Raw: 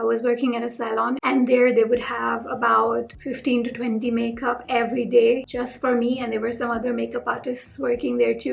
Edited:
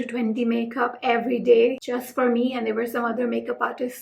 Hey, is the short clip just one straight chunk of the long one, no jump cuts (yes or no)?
yes